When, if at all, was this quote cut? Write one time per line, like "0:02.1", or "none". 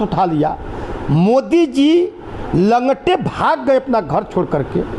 none